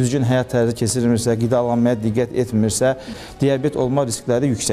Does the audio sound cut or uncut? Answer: cut